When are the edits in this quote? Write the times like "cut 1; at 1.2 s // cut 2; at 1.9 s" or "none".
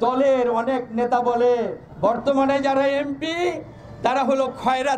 cut 1; at 1.8 s